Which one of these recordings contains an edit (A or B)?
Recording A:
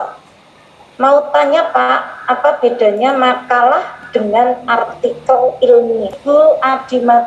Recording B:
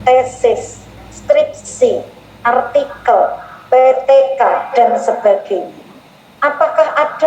A